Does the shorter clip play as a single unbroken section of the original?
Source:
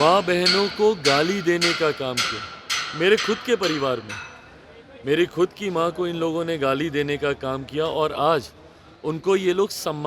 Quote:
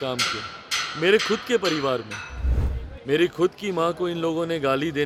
yes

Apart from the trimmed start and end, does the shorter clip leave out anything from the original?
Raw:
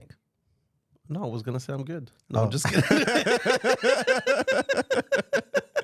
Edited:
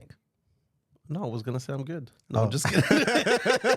no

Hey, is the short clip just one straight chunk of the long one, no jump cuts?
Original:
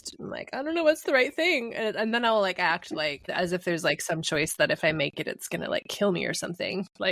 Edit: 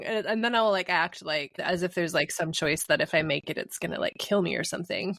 yes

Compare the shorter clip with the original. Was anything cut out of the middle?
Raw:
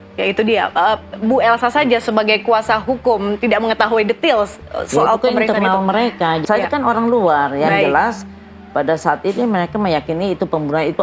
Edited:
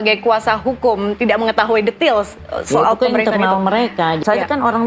no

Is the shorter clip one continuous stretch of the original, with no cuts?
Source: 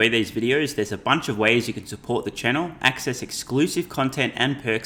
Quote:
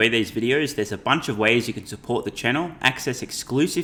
yes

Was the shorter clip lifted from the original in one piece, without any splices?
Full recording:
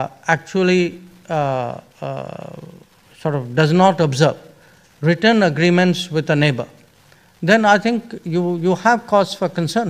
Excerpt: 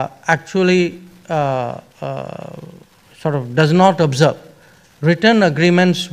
yes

